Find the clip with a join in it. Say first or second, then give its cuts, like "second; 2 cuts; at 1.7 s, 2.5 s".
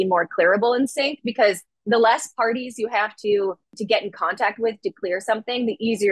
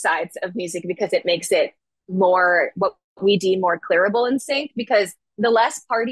first; 1 cut; at 3.7 s